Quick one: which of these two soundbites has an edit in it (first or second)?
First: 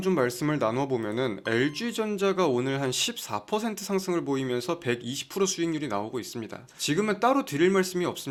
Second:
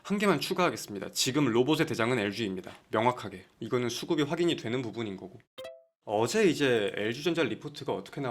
second